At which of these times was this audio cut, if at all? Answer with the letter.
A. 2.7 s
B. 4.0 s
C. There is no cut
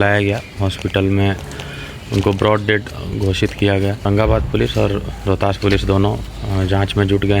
B